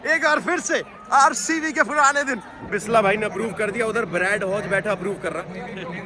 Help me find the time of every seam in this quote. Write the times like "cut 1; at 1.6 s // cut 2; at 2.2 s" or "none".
cut 1; at 2.7 s

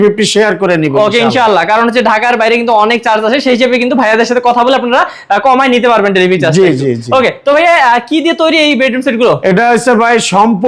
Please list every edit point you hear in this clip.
none

